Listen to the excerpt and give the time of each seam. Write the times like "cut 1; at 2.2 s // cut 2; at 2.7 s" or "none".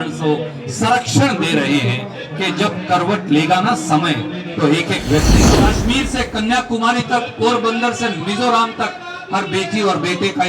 cut 1; at 5.5 s

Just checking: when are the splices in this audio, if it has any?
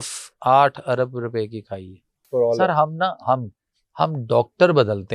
cut 1; at 2.3 s

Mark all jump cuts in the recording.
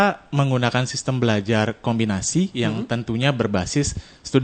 none

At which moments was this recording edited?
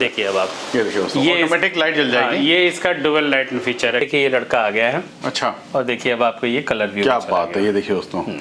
cut 1; at 4.0 s

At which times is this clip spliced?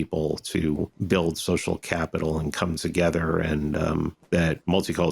cut 1; at 1.0 s // cut 2; at 4.2 s

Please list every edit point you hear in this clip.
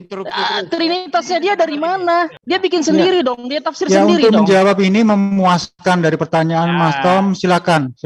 cut 1; at 2.4 s

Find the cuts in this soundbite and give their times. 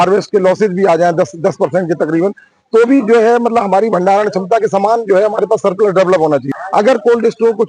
cut 1; at 6.6 s

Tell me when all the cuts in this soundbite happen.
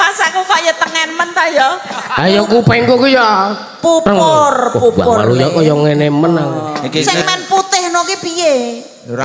cut 1; at 7.0 s

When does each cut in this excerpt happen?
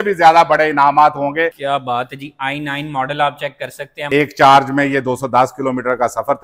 cut 1; at 1.6 s // cut 2; at 4.1 s

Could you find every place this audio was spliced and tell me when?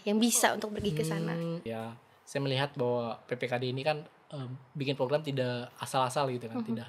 cut 1; at 1.7 s

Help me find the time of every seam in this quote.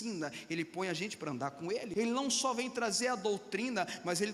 cut 1; at 1.9 s

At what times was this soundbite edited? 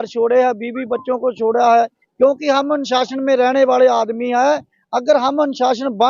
cut 1; at 2.0 s

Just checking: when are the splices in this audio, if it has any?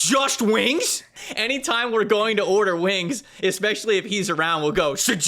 cut 1; at 1.0 s

